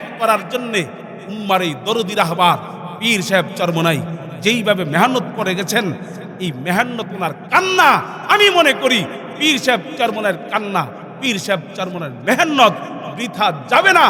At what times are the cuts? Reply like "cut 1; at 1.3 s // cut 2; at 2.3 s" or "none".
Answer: none